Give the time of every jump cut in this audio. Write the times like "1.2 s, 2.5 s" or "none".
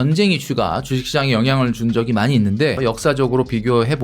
2.8 s

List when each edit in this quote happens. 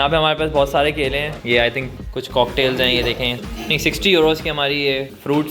1.9 s, 3.4 s

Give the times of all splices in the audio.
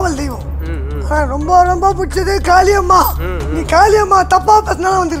none

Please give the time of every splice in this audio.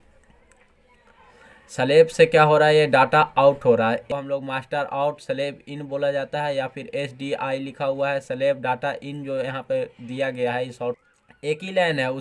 4.0 s, 11.0 s

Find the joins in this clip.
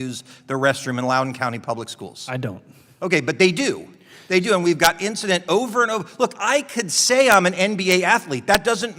none

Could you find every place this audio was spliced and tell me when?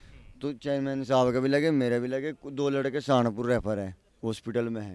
4.0 s

